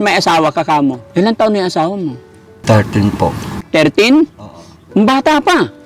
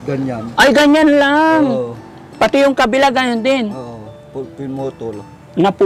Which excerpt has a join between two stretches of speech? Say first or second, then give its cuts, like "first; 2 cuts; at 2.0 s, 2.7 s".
first; 1 cut; at 1.0 s